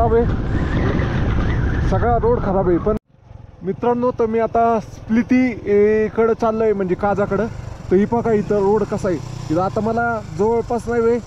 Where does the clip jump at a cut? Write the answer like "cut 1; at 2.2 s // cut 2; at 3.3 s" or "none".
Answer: cut 1; at 3.0 s